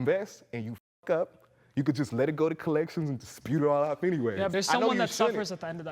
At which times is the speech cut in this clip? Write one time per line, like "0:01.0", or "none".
0:04.5